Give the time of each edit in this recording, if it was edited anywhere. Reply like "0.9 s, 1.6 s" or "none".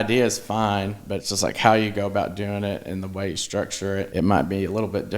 4.1 s